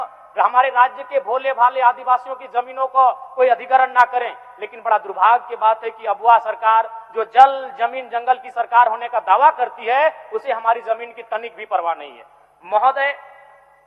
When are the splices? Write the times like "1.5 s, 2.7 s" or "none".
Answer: none